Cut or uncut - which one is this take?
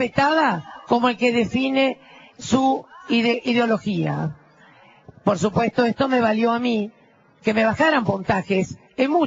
cut